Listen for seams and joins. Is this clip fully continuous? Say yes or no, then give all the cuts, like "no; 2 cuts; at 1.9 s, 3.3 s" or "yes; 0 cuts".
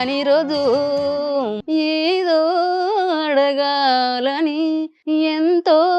no; 2 cuts; at 1.6 s, 5.0 s